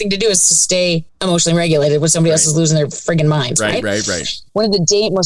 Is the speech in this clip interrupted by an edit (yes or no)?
yes